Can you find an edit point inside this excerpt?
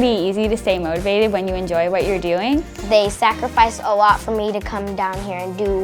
yes; 1 cut; at 2.7 s

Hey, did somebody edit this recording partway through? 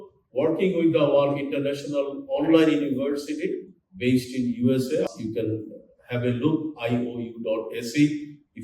yes; 1 cut; at 5.1 s

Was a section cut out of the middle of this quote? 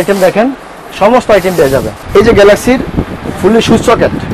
yes; 1 cut; at 2.0 s

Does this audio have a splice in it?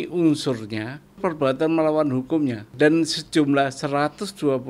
yes; 2 cuts; at 1.2 s, 2.7 s

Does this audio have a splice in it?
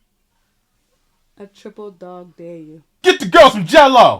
yes; 1 cut; at 2.9 s

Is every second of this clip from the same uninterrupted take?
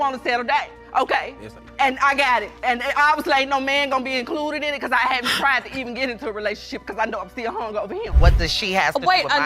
no; 1 cut; at 8.2 s

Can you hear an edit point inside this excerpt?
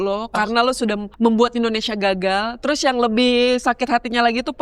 yes; 1 cut; at 1.1 s

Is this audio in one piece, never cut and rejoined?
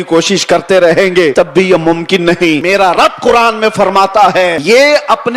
no; 3 cuts; at 1.3 s, 2.6 s, 4.6 s

